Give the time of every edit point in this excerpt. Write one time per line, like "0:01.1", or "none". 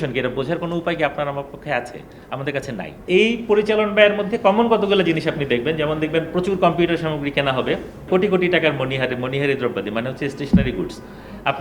0:03.1
0:08.0